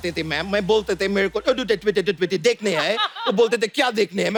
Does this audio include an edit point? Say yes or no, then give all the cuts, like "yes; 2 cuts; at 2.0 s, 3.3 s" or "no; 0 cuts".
no; 0 cuts